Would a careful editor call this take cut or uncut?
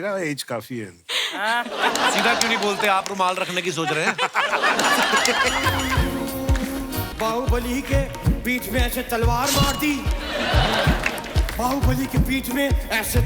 cut